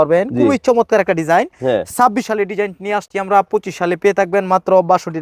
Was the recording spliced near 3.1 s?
no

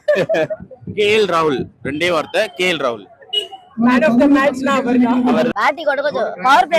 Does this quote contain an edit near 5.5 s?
yes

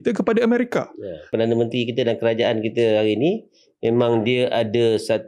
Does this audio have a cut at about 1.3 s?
yes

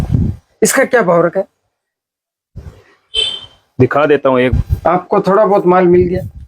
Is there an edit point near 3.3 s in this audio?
no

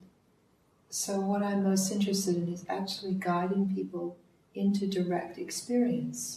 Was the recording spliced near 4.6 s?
no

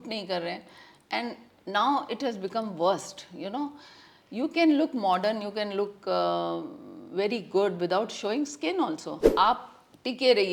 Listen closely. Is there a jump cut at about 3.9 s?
no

